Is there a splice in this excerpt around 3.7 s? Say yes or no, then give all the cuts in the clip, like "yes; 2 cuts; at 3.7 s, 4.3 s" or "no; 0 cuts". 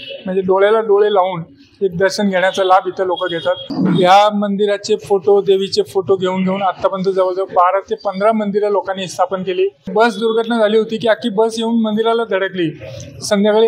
yes; 2 cuts; at 3.7 s, 9.8 s